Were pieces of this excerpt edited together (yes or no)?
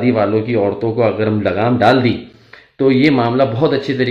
no